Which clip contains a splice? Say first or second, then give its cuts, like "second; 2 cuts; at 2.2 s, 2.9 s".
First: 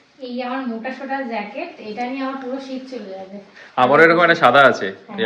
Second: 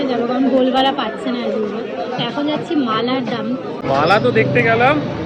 second; 1 cut; at 3.8 s